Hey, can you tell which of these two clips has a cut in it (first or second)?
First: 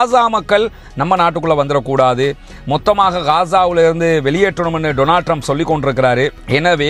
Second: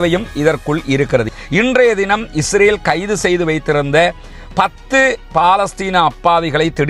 second